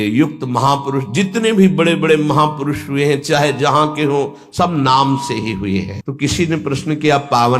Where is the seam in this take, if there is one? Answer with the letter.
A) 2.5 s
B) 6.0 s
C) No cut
B